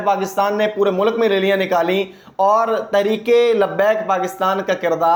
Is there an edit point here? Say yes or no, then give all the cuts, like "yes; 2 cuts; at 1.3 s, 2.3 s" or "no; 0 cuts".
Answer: no; 0 cuts